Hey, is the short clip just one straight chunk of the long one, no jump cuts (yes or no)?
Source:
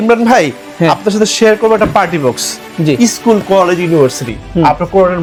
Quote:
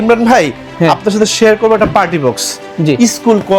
yes